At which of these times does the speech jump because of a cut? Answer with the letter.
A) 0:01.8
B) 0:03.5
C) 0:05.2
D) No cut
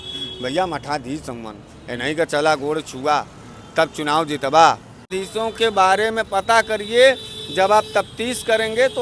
C